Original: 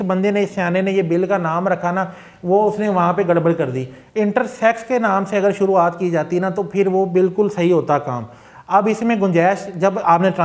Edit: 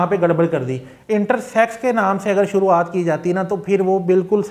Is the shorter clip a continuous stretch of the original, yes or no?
yes